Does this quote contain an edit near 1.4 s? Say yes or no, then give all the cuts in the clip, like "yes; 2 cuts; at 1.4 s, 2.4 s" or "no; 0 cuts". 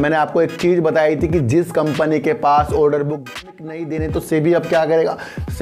no; 1 cut; at 3.3 s